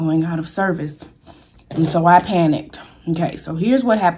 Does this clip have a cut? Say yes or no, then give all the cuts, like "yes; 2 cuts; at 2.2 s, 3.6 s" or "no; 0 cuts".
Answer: no; 0 cuts